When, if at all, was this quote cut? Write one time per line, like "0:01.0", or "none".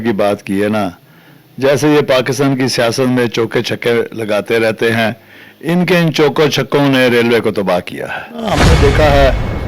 0:08.7